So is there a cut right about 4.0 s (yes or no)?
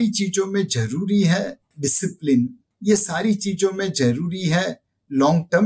no